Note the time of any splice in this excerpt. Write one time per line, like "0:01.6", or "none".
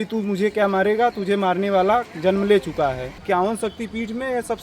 0:03.1